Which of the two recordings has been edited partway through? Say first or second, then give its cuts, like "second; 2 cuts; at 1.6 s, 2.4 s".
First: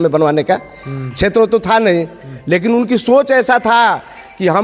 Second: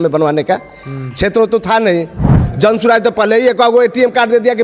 second; 1 cut; at 2.3 s